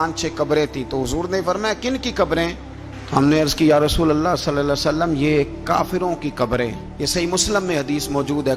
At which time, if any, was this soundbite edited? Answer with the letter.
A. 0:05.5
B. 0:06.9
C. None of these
C